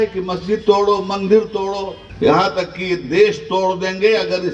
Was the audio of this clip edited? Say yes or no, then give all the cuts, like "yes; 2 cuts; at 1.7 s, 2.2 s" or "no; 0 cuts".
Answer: yes; 1 cut; at 2.0 s